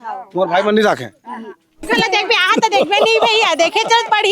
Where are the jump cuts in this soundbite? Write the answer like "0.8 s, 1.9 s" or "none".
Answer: 1.8 s